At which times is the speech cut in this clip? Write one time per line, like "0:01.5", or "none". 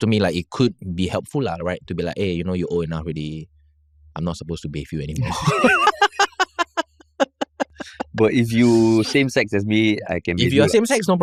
none